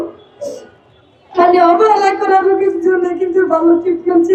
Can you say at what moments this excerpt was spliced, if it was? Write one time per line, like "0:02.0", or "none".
none